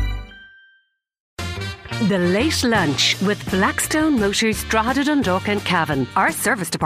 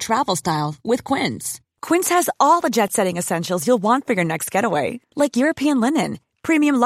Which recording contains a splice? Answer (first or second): first